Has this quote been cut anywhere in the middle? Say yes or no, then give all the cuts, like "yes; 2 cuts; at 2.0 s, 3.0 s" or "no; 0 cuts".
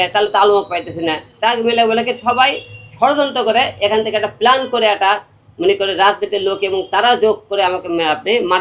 no; 0 cuts